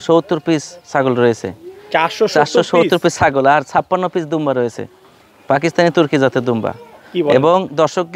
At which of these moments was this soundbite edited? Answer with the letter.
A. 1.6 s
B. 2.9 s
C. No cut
C